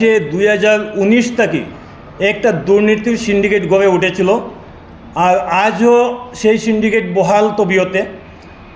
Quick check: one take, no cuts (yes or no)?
yes